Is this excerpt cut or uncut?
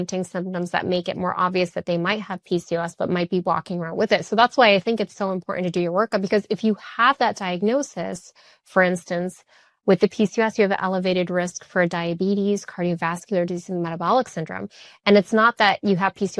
uncut